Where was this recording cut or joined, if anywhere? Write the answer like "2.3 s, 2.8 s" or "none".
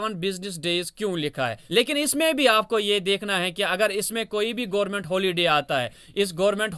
1.6 s